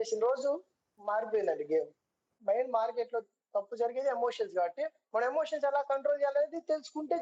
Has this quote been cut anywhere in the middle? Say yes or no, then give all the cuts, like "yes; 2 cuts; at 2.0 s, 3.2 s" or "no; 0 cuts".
yes; 1 cut; at 2.3 s